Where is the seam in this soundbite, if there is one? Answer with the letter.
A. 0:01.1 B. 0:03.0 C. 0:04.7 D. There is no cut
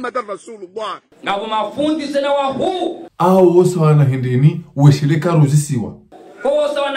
A